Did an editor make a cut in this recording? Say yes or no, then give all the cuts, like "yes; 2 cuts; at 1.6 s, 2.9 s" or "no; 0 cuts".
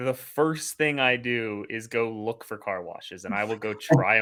no; 0 cuts